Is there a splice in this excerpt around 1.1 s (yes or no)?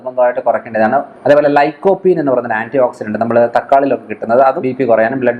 yes